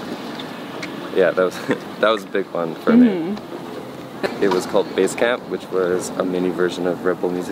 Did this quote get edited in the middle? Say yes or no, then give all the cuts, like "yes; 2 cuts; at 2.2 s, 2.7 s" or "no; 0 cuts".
yes; 1 cut; at 4.2 s